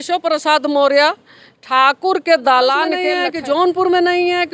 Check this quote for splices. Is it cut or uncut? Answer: cut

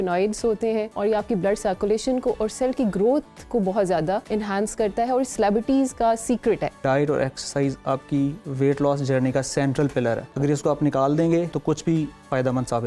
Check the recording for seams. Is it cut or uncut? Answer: cut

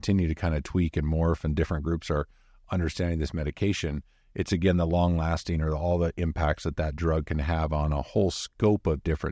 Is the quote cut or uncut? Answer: uncut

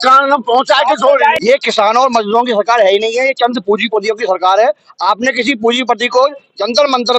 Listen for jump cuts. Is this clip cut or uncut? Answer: cut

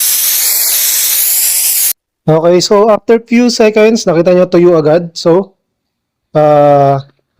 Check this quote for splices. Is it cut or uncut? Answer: cut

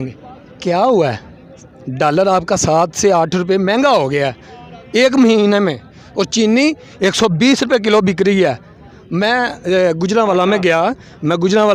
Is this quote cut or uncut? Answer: uncut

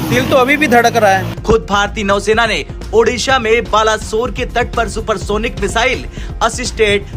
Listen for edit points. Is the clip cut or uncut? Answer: cut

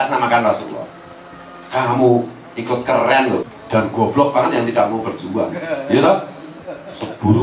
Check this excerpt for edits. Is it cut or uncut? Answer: cut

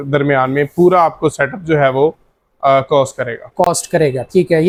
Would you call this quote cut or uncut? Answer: uncut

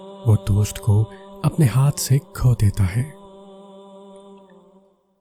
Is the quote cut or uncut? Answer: uncut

